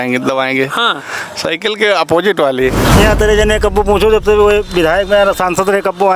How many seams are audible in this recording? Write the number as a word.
one